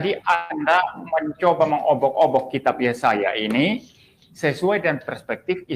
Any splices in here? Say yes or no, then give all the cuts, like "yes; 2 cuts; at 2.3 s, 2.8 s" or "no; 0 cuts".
no; 0 cuts